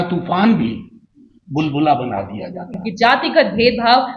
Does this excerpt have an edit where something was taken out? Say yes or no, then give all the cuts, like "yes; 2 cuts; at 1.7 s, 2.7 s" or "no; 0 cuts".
yes; 1 cut; at 2.8 s